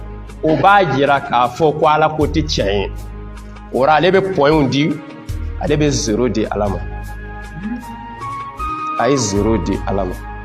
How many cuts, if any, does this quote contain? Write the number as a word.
zero